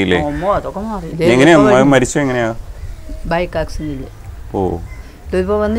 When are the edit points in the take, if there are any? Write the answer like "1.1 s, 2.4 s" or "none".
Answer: 1.0 s